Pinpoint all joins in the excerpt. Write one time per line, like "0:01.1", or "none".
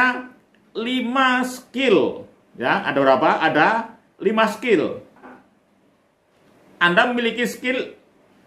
0:05.4